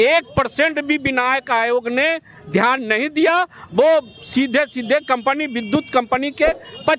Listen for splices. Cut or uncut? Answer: uncut